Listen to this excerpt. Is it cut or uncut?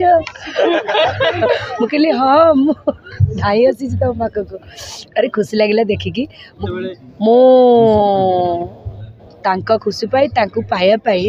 cut